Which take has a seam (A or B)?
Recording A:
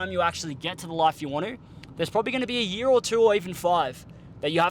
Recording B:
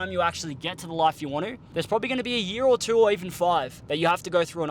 B